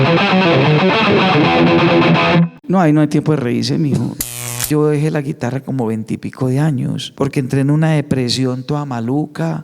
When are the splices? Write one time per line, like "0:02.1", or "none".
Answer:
0:02.6
0:04.5
0:07.0